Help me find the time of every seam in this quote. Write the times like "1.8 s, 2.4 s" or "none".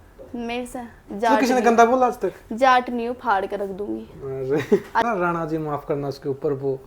5.0 s